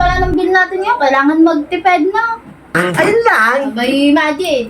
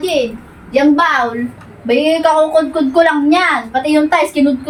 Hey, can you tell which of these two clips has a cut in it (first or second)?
first